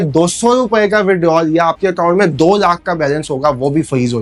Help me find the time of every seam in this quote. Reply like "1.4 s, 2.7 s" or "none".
none